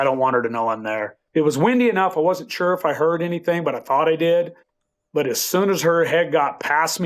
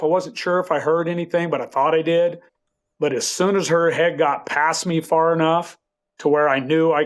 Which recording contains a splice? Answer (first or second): first